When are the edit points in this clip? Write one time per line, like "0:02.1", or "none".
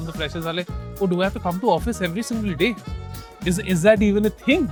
none